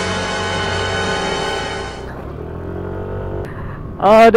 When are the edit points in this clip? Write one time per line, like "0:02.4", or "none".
0:01.8
0:03.5